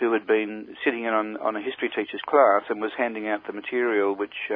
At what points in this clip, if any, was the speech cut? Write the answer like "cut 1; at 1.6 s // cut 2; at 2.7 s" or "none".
none